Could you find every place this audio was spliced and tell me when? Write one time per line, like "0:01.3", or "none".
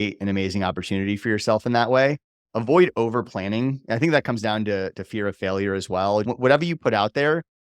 0:06.3